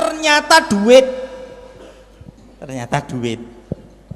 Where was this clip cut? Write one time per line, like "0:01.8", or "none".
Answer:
0:02.5

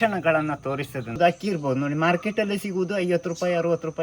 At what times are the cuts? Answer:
0:01.1

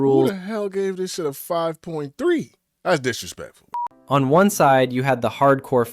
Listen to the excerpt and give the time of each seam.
0:03.7

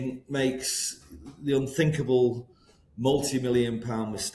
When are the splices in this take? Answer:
none

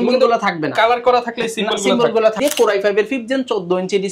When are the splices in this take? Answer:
0:02.4

